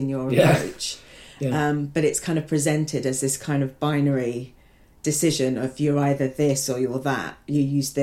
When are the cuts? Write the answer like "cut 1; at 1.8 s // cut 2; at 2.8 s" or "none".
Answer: none